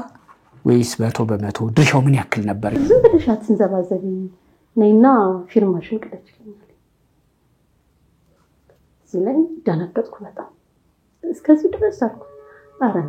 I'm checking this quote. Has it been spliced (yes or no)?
yes